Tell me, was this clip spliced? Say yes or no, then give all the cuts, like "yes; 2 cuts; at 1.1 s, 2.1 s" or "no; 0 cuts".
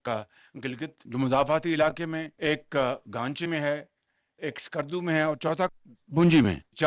yes; 2 cuts; at 1.0 s, 2.3 s